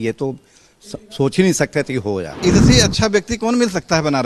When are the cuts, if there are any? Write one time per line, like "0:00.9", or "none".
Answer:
0:02.4